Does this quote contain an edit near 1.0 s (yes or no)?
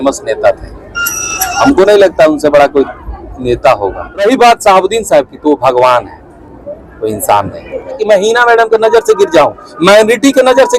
no